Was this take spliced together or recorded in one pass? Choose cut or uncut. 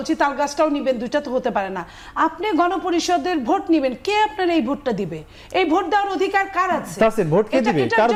uncut